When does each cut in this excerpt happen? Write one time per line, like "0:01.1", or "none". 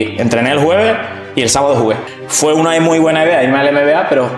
0:02.0